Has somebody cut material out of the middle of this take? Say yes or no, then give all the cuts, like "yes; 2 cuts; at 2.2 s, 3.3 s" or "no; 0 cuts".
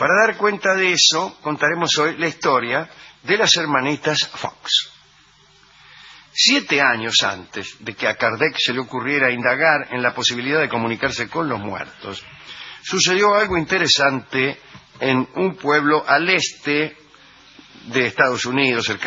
yes; 1 cut; at 17.3 s